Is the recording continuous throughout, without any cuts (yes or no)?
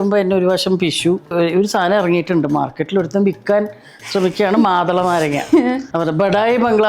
no